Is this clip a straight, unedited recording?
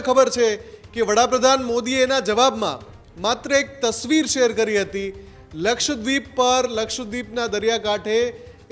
yes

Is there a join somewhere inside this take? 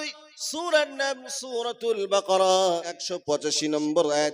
yes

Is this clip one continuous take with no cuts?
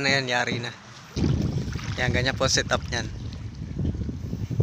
no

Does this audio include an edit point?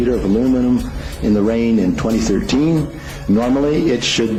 no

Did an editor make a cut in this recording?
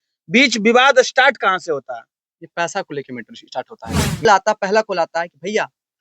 yes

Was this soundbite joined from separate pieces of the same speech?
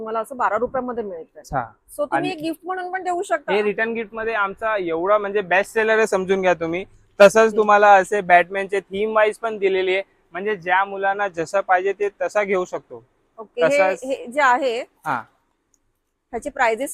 no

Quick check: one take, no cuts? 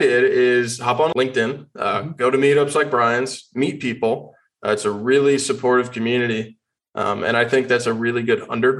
no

